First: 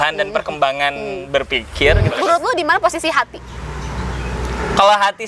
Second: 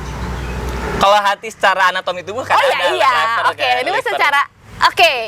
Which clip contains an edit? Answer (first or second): first